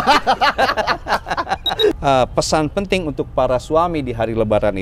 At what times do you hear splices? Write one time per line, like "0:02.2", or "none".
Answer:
0:02.0